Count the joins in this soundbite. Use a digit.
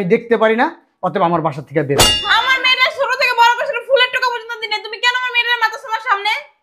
1